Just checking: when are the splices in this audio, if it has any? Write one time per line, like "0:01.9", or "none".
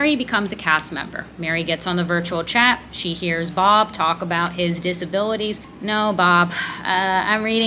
0:05.7